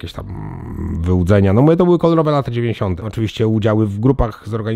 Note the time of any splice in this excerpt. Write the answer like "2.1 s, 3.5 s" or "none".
3.0 s